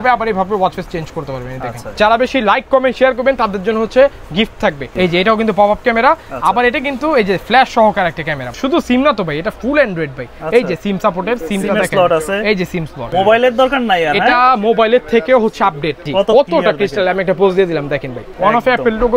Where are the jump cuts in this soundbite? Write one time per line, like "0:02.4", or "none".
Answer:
0:01.9
0:04.9
0:08.5
0:13.1
0:15.9
0:18.3